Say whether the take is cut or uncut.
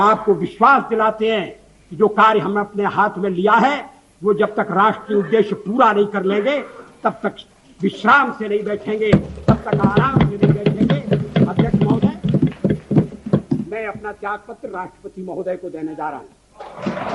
uncut